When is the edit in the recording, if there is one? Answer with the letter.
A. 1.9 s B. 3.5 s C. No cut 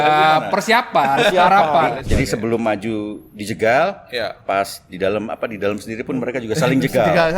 A